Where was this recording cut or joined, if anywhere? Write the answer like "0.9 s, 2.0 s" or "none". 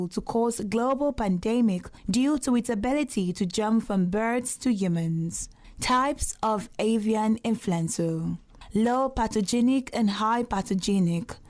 1.9 s